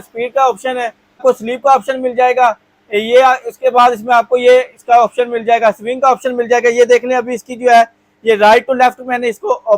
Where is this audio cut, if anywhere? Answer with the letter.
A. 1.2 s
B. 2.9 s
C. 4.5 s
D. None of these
A